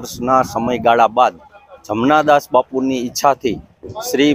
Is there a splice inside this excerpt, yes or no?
no